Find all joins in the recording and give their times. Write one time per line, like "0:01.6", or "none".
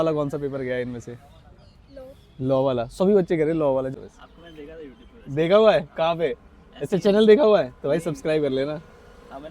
0:03.9